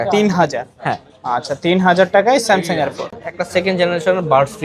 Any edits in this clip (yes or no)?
yes